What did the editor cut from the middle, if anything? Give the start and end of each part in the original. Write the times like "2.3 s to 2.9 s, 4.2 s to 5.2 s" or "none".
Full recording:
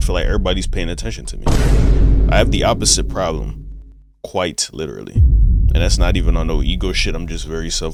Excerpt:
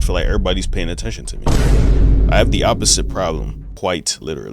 3.6 s to 4.1 s